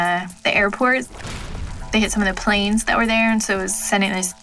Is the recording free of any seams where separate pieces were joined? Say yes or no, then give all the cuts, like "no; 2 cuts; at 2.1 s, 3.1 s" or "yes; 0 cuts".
yes; 0 cuts